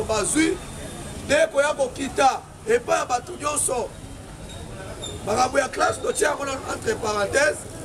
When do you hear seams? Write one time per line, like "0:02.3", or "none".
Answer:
none